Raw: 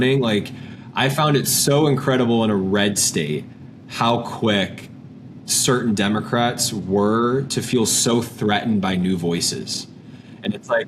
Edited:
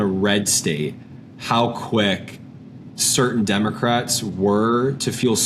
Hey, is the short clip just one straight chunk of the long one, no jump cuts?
yes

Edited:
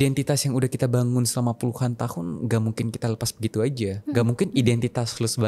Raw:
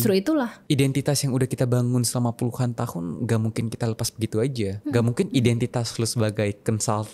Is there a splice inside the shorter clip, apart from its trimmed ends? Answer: no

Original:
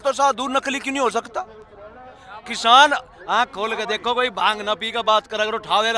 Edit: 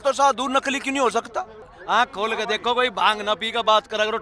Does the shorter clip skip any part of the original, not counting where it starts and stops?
yes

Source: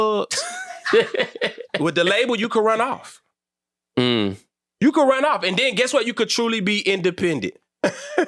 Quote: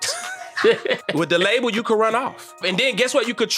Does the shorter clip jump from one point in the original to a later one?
yes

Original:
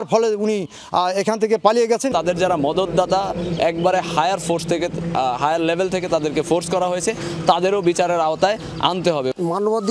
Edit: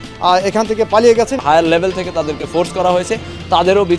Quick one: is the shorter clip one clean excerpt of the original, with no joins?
no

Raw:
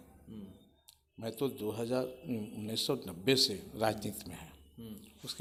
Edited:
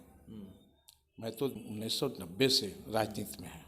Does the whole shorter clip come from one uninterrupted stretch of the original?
no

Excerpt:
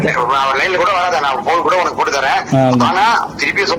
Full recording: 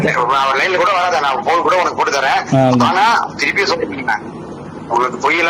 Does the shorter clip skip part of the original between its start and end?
no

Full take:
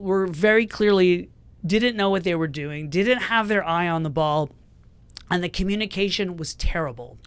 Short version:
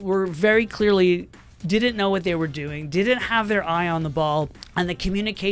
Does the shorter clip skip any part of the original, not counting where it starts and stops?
yes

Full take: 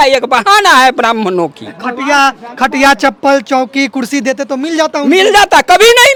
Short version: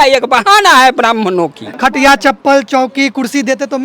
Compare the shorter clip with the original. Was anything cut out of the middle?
yes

